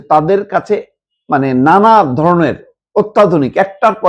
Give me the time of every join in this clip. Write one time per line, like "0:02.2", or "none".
none